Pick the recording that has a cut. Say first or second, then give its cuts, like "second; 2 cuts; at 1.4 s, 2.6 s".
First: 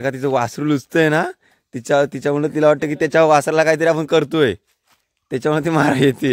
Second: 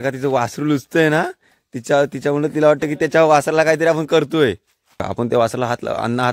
second; 1 cut; at 5.1 s